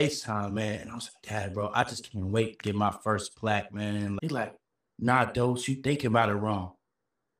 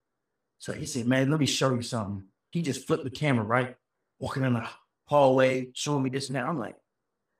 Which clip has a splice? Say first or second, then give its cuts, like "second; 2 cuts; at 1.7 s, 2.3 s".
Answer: first; 1 cut; at 4.2 s